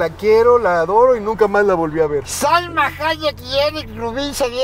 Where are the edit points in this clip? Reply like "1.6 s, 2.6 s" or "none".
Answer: none